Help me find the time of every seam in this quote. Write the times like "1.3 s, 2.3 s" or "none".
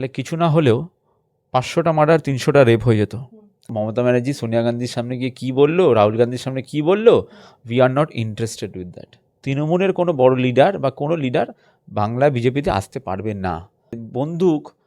3.7 s, 9.4 s, 14.0 s